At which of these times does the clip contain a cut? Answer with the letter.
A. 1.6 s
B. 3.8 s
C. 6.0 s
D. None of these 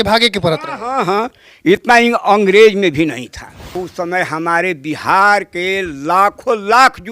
B